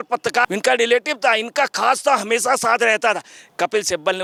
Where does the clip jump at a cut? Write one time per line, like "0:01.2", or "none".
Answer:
none